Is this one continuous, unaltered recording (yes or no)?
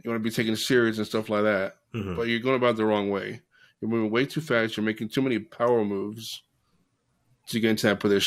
yes